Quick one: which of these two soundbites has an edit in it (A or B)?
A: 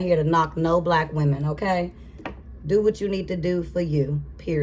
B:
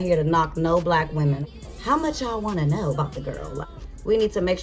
B